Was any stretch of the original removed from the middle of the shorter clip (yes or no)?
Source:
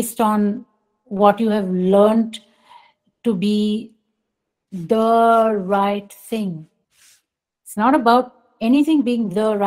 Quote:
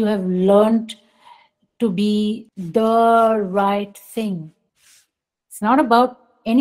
yes